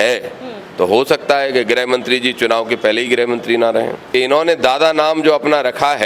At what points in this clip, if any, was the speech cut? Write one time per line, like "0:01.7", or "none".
0:04.0

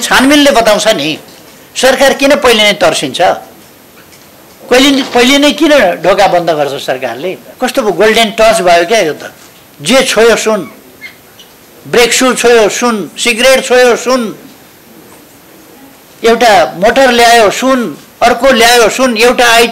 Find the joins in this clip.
0:07.5

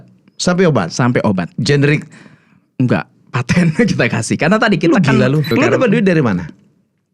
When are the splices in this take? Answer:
0:05.5

